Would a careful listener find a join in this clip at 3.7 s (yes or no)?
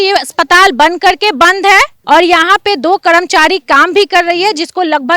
no